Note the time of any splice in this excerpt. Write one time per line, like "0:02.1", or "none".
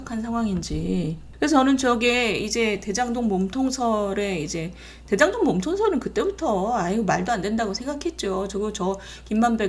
0:01.2